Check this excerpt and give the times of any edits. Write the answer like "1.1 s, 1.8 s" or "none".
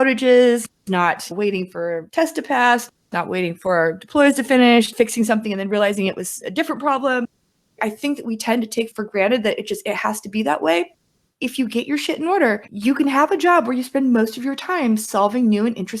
7.6 s, 11.1 s